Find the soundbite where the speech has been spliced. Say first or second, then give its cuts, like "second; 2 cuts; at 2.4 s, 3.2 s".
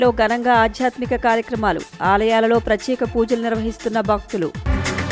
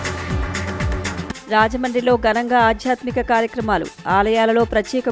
second; 1 cut; at 1.0 s